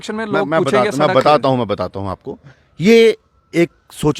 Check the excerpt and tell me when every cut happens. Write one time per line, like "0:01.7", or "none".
0:02.6